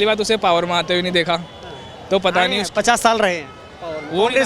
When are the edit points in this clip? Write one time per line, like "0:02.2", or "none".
none